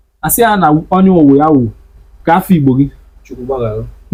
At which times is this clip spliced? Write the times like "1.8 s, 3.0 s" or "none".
none